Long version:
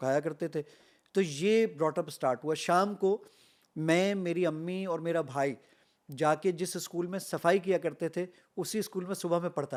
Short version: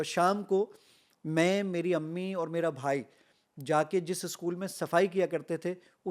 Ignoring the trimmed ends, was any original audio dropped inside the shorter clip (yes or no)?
no